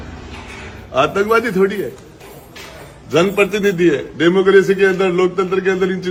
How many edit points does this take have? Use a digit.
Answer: 0